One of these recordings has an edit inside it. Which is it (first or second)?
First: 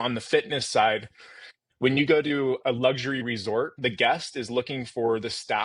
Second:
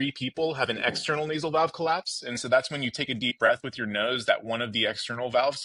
first